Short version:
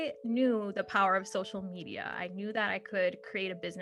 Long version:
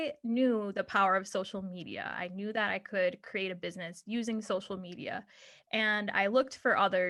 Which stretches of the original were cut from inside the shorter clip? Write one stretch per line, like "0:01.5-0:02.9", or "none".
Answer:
none

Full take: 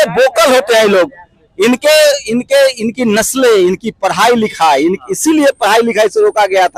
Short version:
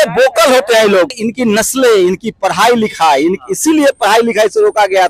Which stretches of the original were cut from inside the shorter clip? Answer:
0:01.2-0:02.8

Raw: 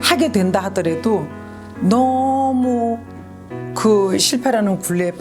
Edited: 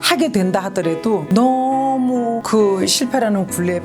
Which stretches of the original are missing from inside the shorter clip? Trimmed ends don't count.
0:01.2-0:01.8
0:03.0-0:03.7

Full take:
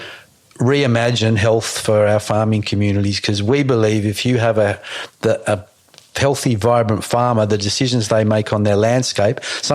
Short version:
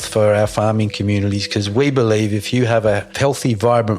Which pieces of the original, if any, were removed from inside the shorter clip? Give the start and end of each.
0:04.8-0:06.1

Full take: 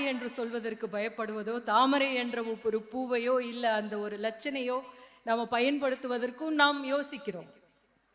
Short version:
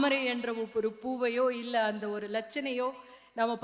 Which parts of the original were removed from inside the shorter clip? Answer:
none

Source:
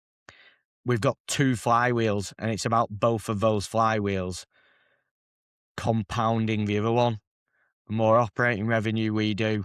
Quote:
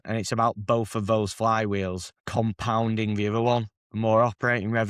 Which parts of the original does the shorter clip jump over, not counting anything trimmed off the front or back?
0:04.5-0:05.6
0:07.3-0:07.8

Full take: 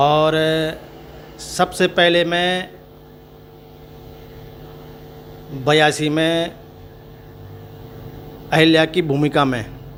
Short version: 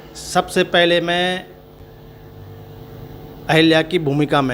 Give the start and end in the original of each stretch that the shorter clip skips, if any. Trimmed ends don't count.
0:03.0-0:06.8

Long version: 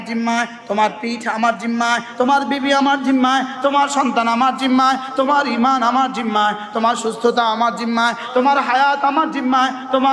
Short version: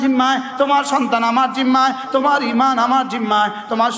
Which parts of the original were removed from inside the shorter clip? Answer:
none

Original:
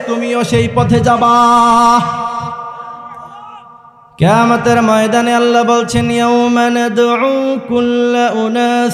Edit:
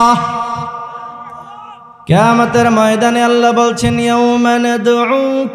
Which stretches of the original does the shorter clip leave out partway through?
0:03.7-0:04.0

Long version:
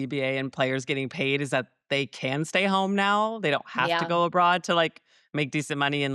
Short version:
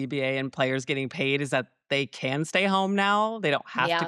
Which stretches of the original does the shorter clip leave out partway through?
none

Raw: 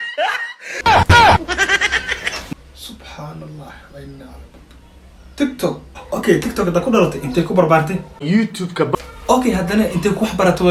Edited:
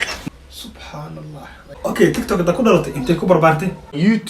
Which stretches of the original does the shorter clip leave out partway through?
0:03.9-0:05.9

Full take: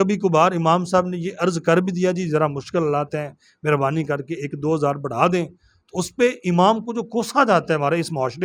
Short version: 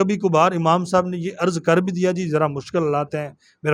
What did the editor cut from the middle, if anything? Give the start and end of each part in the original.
none

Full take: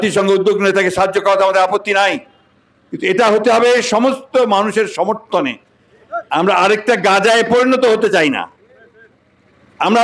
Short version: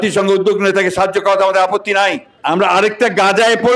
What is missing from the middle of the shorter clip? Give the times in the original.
0:02.3-0:06.2

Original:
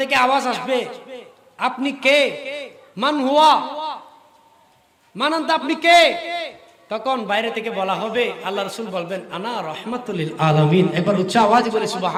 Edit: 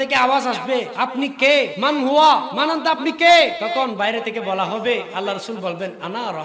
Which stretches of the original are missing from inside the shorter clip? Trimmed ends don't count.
0:00.9-0:01.5
0:02.4-0:02.9
0:03.7-0:05.1
0:06.3-0:06.9

